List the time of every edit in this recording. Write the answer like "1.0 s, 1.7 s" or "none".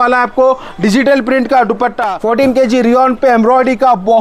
2.1 s